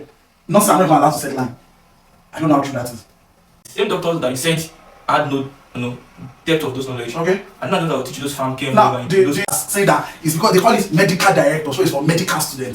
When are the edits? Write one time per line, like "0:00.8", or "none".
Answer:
0:03.6
0:09.5